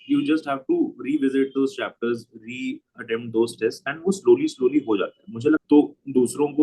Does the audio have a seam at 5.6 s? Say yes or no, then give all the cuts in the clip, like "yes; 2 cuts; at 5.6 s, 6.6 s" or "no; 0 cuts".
yes; 1 cut; at 5.6 s